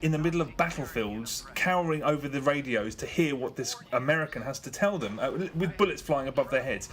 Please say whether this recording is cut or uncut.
cut